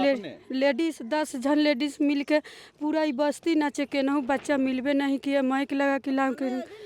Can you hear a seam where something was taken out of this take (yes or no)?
no